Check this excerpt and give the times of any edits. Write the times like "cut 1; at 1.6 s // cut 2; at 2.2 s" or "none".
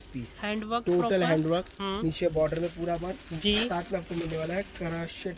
none